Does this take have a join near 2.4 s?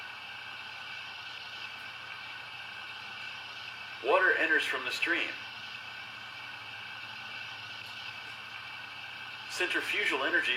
no; 1 cut; at 8.9 s

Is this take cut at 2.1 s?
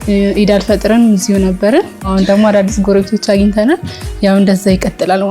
yes; 1 cut; at 2.1 s

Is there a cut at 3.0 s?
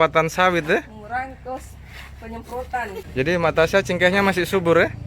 yes; 1 cut; at 3.0 s

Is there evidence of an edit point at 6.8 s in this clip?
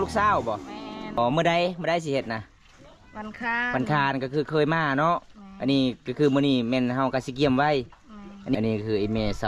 no; 2 cuts; at 1.2 s, 8.5 s

